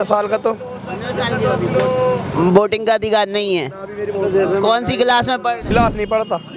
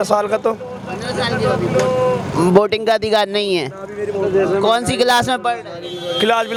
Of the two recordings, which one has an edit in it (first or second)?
first